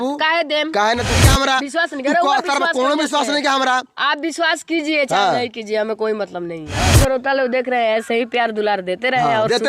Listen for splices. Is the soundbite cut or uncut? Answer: cut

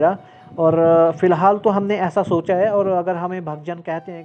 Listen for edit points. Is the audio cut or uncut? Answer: uncut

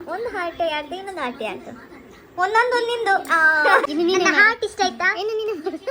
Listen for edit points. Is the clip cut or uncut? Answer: cut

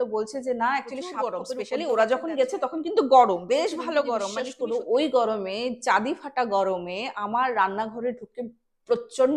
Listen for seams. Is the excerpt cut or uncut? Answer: cut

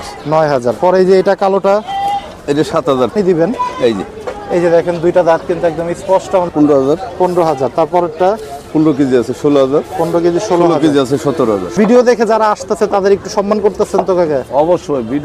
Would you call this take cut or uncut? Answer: cut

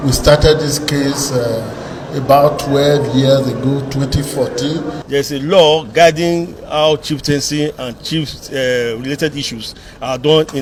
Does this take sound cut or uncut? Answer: uncut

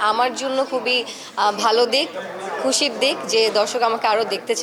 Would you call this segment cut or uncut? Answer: uncut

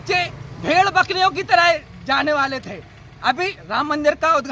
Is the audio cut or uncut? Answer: uncut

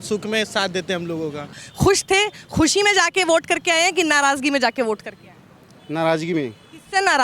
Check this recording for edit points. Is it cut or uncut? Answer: cut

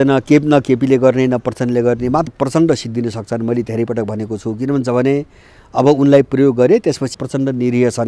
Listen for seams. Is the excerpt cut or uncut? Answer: cut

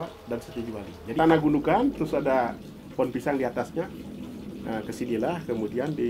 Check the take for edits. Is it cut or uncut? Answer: cut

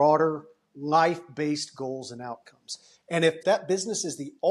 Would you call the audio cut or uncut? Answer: cut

